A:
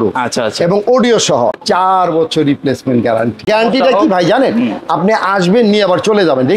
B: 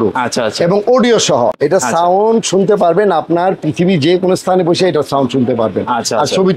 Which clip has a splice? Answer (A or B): A